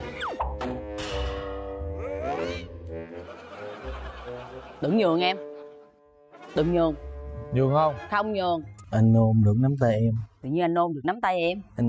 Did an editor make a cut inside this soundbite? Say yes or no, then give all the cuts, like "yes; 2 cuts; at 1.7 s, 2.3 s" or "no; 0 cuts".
yes; 1 cut; at 8.7 s